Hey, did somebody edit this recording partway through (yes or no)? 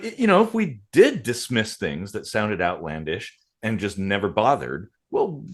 no